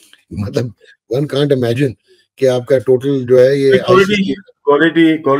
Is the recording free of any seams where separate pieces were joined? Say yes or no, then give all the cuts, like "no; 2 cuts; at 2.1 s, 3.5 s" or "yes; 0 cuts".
yes; 0 cuts